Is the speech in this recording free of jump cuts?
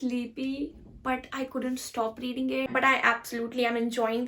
no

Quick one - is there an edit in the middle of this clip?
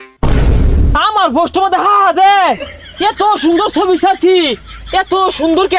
yes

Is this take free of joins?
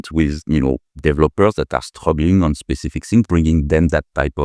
yes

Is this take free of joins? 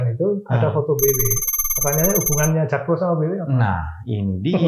yes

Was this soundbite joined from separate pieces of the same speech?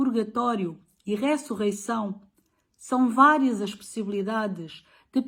no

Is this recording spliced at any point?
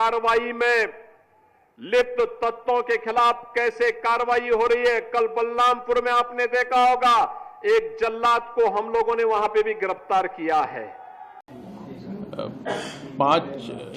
yes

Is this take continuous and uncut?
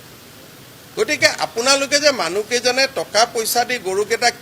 yes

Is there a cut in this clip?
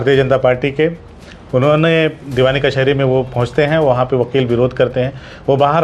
yes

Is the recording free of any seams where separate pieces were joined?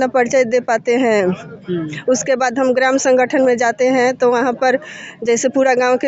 yes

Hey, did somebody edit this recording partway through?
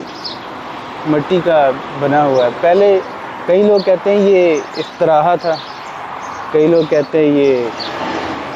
no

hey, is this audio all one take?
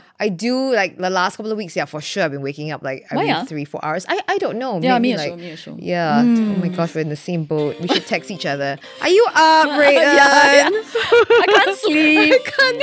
yes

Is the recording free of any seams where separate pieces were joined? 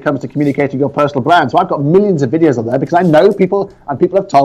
yes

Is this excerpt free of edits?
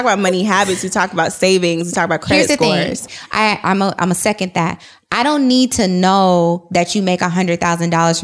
yes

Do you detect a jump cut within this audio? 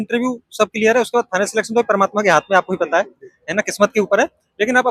no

